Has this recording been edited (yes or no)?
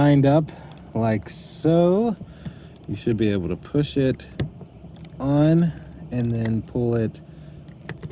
no